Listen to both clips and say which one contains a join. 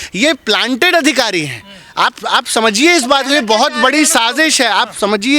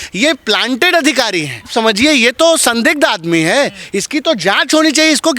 second; 1 cut; at 1.7 s

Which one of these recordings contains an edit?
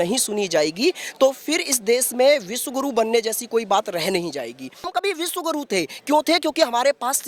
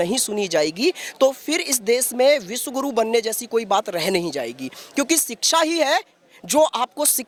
first; 1 cut; at 4.9 s

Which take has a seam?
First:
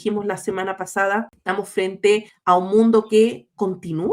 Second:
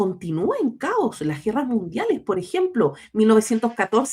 first; 2 cuts; at 1.3 s, 2.3 s

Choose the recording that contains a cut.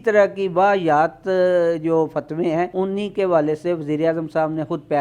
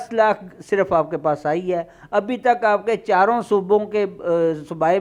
first; 1 cut; at 2.7 s

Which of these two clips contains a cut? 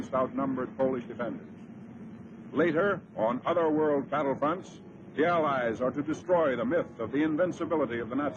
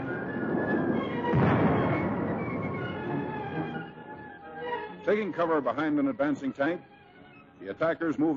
first; 1 cut; at 7.3 s

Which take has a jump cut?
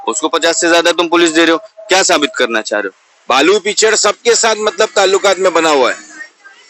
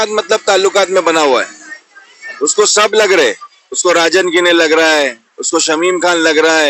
first; 1 cut; at 3.0 s

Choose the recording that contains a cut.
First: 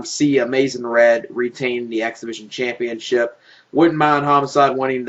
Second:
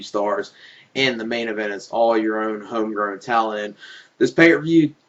second; 1 cut; at 2.2 s

